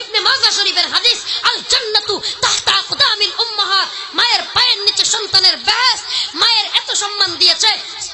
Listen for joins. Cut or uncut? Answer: uncut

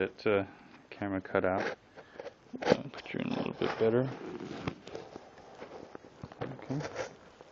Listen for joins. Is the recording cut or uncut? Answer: uncut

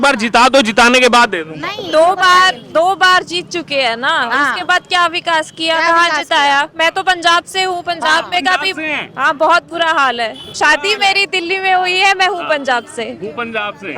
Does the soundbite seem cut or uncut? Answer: uncut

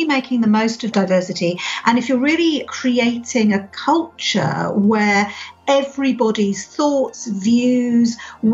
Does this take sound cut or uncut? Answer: cut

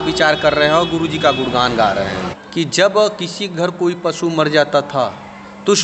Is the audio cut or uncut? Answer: cut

